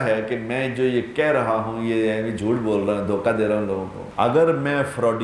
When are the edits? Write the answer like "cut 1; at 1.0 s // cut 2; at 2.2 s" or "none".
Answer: cut 1; at 4.0 s